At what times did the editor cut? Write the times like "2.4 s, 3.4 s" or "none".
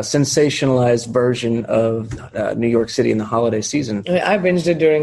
4.0 s

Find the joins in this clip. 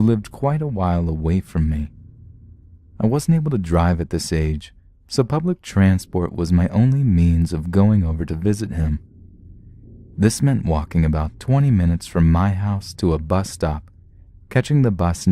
1.7 s

